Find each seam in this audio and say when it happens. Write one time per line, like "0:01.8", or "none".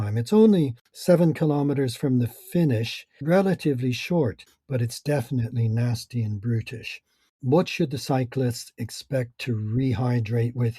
0:03.1
0:04.5
0:07.4